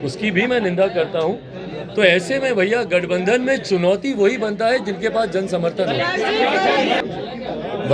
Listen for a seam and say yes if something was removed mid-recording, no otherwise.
no